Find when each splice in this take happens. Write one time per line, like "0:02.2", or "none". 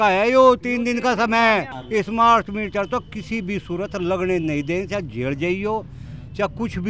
0:01.8